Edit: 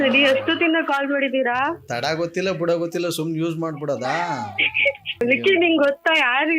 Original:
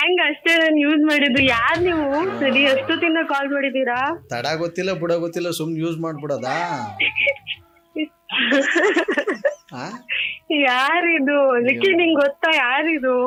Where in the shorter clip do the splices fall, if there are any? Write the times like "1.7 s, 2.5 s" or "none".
5.2 s